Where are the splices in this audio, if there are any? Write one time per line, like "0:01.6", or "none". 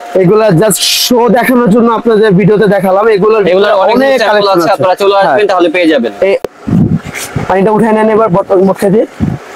0:06.5

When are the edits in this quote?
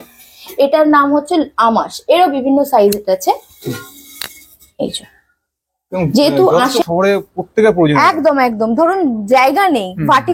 0:06.8

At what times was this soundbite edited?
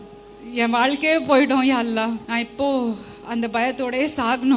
0:02.2

